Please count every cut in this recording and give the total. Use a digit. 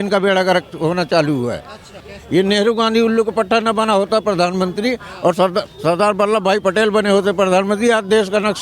1